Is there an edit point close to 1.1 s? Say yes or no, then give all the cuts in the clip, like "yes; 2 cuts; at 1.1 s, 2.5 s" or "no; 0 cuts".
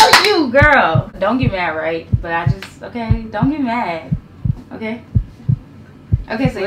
yes; 1 cut; at 1.1 s